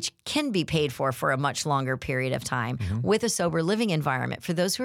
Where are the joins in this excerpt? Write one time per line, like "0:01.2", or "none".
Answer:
none